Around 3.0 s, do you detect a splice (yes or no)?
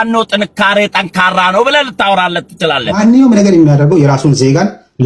yes